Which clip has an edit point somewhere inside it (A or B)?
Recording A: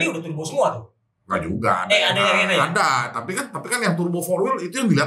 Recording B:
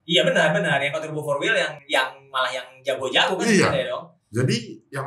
B